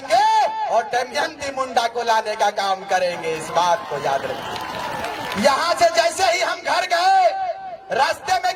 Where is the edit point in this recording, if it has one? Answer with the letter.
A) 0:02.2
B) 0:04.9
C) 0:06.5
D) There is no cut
D